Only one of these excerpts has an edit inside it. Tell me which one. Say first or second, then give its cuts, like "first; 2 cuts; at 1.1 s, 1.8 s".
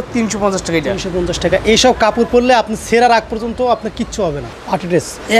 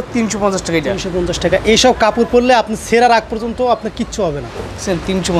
first; 1 cut; at 4.5 s